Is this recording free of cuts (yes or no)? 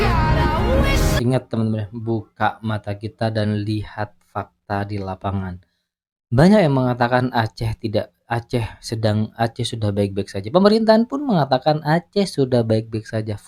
yes